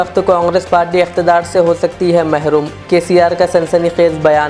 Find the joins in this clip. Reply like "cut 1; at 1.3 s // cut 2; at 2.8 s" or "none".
none